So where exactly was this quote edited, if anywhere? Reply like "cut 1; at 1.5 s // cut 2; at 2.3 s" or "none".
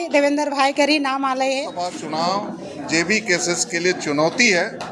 cut 1; at 2.0 s